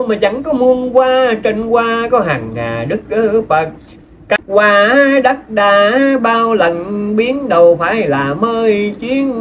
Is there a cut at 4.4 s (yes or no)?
yes